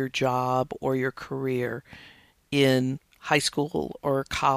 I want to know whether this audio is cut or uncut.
uncut